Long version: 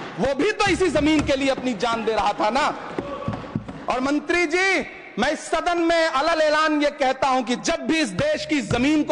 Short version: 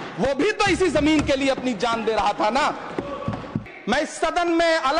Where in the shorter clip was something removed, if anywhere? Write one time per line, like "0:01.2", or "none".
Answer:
0:03.7